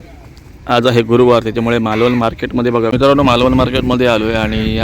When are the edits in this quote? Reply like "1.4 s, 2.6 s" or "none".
2.9 s